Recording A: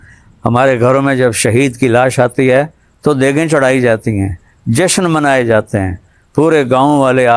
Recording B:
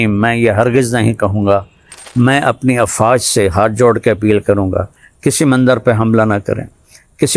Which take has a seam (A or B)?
B